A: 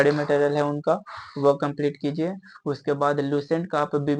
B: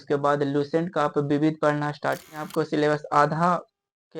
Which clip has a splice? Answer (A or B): B